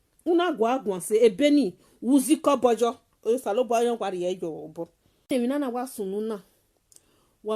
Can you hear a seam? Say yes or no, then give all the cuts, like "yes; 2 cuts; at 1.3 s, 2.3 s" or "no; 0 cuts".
yes; 1 cut; at 5.3 s